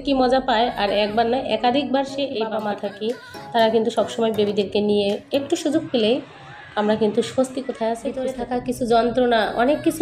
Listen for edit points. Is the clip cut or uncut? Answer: cut